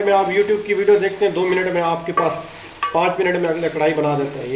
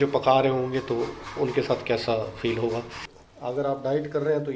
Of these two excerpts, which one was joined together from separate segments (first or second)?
second